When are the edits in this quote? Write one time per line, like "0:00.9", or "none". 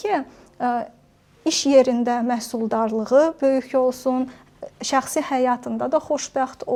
none